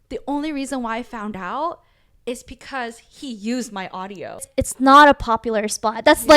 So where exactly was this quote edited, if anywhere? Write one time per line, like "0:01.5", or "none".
0:04.3